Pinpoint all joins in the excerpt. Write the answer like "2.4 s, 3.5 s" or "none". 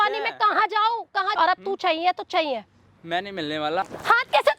1.3 s, 3.8 s